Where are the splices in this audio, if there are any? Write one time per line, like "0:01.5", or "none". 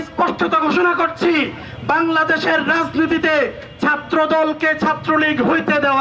none